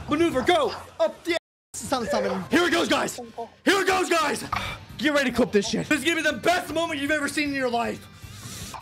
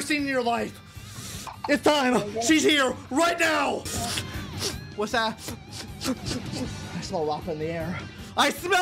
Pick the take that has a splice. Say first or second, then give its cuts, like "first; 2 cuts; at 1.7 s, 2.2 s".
first; 1 cut; at 2.4 s